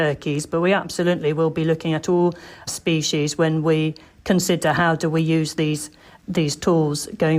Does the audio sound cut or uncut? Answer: cut